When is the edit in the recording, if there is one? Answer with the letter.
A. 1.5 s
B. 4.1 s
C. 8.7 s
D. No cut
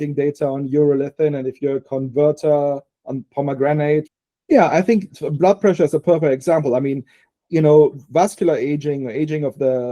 B